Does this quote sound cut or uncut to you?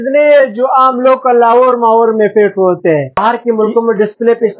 cut